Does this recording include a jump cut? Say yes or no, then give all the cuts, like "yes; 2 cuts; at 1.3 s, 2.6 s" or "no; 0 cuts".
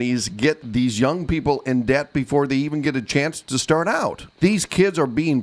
yes; 1 cut; at 4.2 s